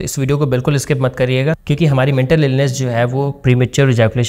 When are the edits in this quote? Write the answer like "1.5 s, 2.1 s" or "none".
1.6 s